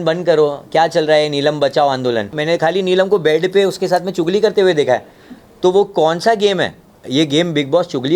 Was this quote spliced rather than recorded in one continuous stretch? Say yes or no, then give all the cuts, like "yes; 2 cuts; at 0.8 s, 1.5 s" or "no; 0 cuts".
yes; 1 cut; at 2.4 s